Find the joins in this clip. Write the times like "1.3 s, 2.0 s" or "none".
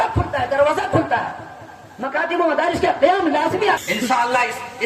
3.8 s